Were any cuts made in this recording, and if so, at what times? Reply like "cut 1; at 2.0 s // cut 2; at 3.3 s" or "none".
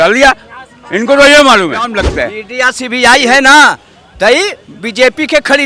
cut 1; at 1.9 s